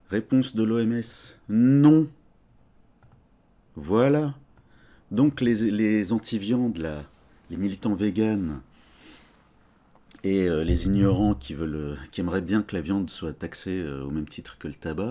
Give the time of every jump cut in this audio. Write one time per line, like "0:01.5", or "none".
none